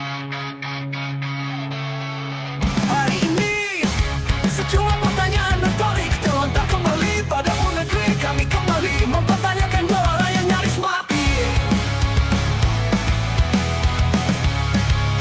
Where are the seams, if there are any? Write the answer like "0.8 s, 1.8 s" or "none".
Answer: none

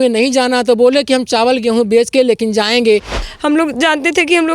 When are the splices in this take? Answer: 3.1 s

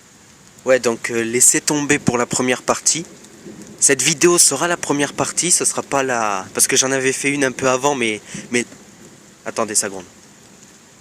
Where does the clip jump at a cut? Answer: 4.8 s

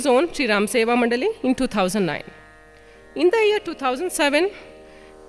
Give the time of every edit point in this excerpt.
1.0 s

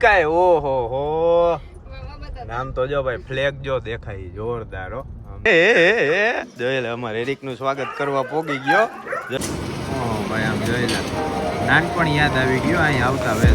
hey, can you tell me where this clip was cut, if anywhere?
5.4 s, 9.4 s

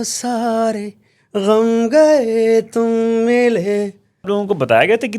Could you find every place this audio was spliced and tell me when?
4.2 s

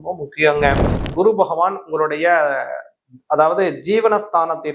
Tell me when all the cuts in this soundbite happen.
1.0 s

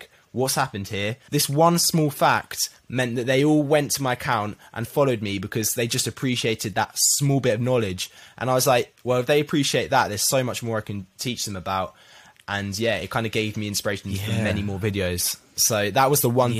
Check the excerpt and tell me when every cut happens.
1.2 s

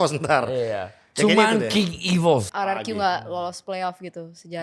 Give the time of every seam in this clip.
2.5 s

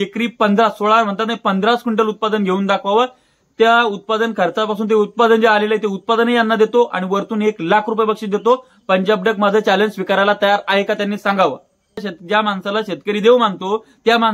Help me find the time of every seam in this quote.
12.1 s

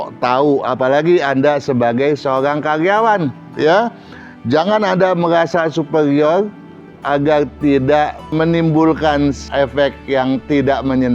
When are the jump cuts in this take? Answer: 8.3 s, 9.4 s

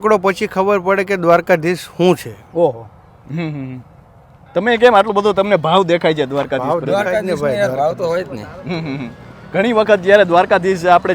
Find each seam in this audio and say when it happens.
none

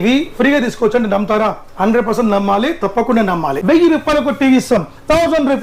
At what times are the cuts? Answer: 3.6 s

